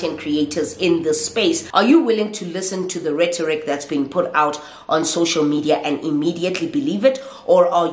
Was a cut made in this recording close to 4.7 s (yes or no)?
no